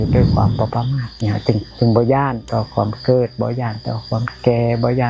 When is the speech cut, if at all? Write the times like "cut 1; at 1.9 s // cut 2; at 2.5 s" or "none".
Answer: cut 1; at 1.1 s // cut 2; at 2.4 s